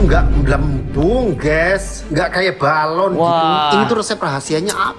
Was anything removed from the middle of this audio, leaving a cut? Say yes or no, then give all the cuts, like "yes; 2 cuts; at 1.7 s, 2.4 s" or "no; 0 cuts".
no; 0 cuts